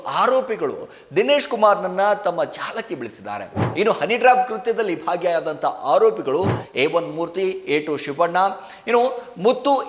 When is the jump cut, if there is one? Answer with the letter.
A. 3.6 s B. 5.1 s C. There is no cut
A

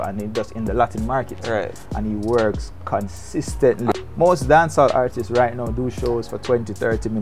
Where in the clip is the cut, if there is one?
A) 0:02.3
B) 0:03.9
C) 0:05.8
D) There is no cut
B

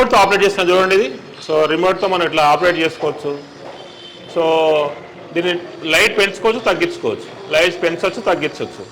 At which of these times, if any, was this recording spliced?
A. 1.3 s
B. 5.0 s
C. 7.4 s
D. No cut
D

